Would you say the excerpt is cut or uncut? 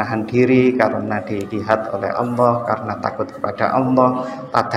uncut